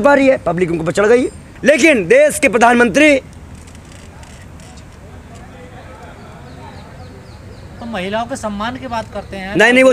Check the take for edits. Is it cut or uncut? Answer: cut